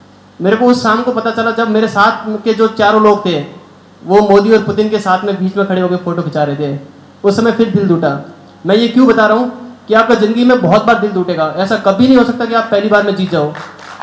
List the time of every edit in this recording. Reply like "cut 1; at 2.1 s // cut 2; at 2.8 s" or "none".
none